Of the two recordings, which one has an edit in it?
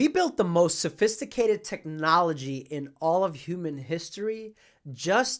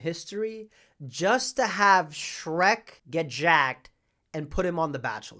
second; 1 cut; at 2.9 s

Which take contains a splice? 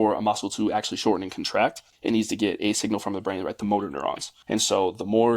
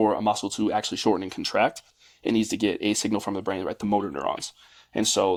first; 2 cuts; at 1.9 s, 4.3 s

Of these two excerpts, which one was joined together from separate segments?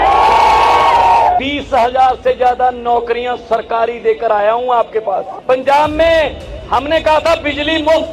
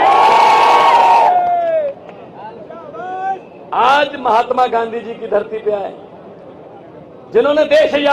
first; 2 cuts; at 1.4 s, 5.3 s

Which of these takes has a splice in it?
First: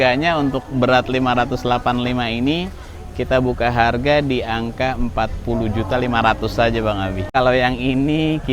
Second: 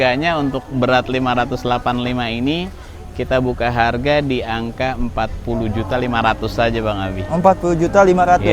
first; 1 cut; at 7.3 s

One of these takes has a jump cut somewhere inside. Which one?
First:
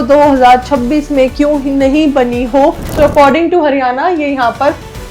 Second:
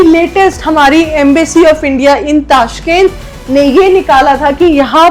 first; 1 cut; at 2.9 s

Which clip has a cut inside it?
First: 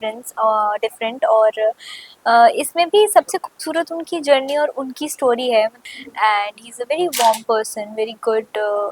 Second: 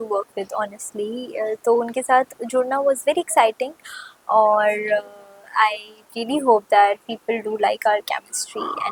first; 1 cut; at 5.8 s

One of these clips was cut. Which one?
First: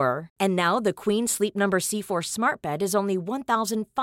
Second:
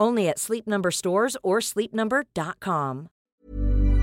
second; 1 cut; at 3.1 s

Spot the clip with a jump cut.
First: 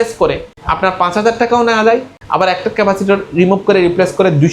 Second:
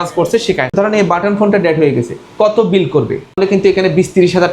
second; 2 cuts; at 0.7 s, 3.4 s

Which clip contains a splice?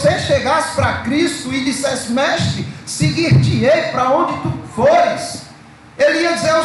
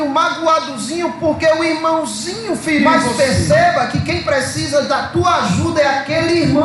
second; 1 cut; at 3.0 s

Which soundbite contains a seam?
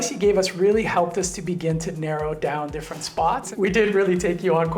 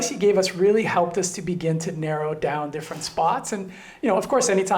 first; 1 cut; at 3.5 s

